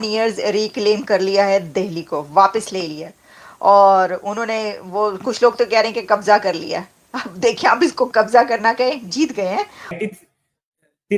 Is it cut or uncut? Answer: cut